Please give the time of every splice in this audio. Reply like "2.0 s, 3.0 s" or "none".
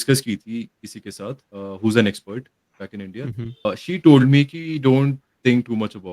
1.5 s, 3.7 s